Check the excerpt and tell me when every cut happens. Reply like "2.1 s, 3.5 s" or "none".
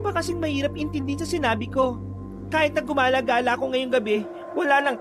none